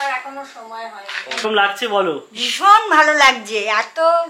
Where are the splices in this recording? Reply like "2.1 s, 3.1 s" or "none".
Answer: 1.4 s